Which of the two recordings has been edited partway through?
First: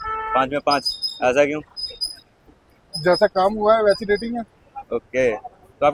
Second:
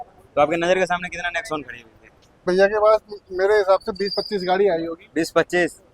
second; 1 cut; at 2.4 s

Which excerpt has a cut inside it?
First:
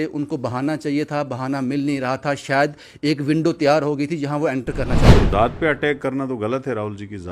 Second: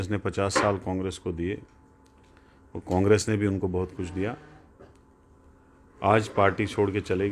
first; 1 cut; at 5.2 s

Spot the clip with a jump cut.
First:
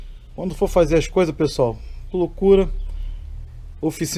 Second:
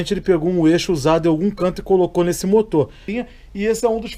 second; 1 cut; at 3.1 s

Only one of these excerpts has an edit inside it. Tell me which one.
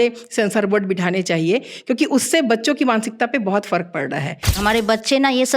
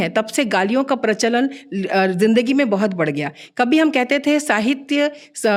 first; 1 cut; at 4.6 s

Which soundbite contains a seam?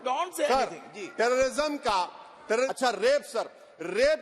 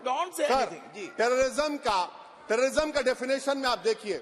first; 1 cut; at 2.7 s

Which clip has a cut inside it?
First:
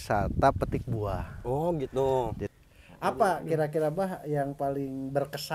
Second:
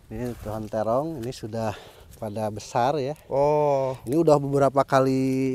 first; 1 cut; at 2.4 s

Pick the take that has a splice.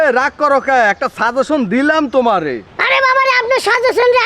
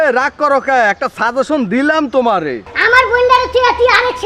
second; 1 cut; at 2.7 s

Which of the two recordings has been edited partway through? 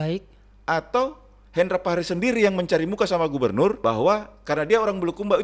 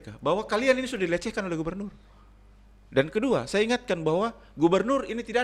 first; 1 cut; at 3.8 s

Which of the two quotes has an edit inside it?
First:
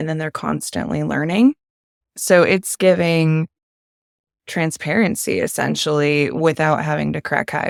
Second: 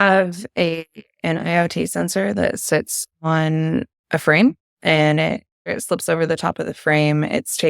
second; 1 cut; at 5.7 s

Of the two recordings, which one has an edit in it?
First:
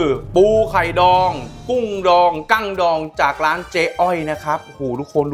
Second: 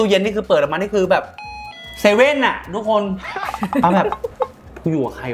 second; 1 cut; at 3.3 s

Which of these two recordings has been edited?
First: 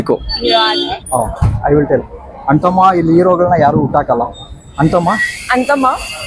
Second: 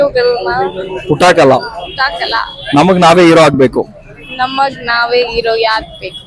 first; 1 cut; at 1.0 s

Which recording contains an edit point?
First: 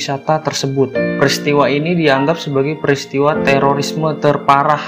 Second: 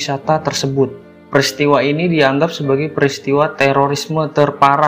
first; 1 cut; at 1.0 s

